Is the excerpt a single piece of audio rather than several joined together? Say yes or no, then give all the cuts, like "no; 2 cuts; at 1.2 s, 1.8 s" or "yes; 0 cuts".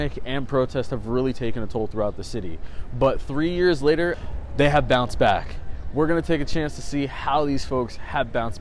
yes; 0 cuts